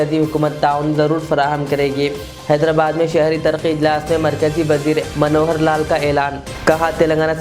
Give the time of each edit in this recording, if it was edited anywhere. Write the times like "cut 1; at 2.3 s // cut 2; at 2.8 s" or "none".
none